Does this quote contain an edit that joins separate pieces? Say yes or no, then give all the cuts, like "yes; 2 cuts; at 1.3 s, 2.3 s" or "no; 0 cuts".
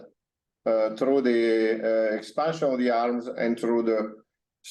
no; 0 cuts